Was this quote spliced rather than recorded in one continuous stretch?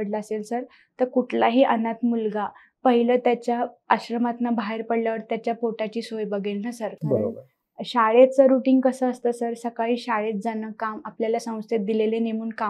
no; 0 cuts

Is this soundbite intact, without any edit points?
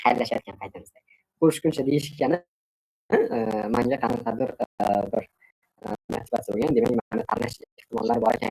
yes; 0 cuts

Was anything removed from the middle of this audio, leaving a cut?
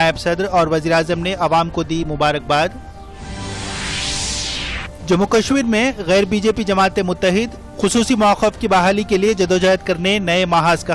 no; 0 cuts

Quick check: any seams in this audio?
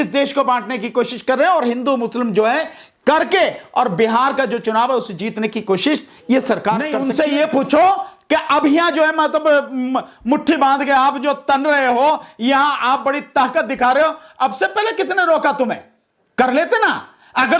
yes; 1 cut; at 7.0 s

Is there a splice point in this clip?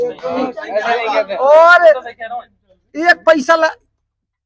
no; 0 cuts

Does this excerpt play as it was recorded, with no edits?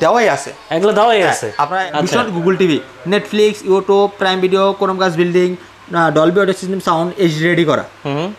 no; 1 cut; at 1.8 s

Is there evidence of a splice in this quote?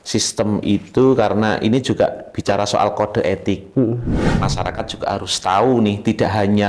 yes; 1 cut; at 4.3 s

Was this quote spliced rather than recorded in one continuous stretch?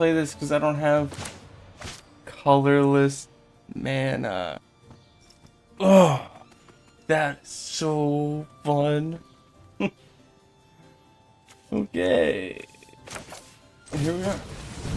no; 0 cuts

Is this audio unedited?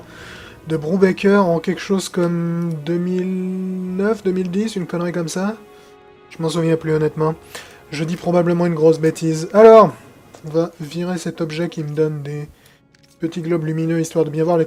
yes; 0 cuts

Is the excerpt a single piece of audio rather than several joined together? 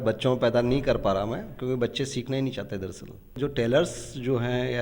no; 1 cut; at 3.3 s

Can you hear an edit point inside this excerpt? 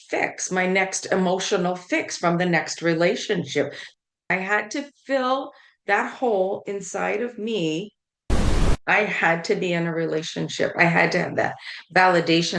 yes; 2 cuts; at 4.0 s, 8.6 s

